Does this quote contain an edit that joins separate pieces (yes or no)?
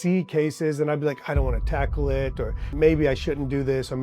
yes